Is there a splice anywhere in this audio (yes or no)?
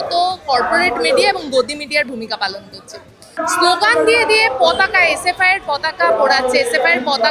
yes